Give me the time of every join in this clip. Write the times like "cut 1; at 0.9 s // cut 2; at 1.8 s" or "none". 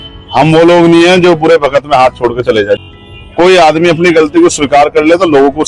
cut 1; at 2.8 s